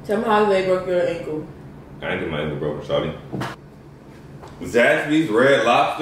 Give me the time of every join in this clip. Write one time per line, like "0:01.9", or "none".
0:03.6